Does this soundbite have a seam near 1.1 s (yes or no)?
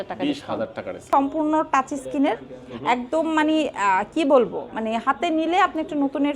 yes